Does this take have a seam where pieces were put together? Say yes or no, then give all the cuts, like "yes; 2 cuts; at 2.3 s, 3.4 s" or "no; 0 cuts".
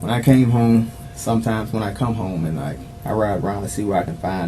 yes; 1 cut; at 2.9 s